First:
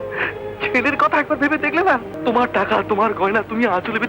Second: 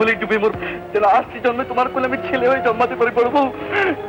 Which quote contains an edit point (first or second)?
first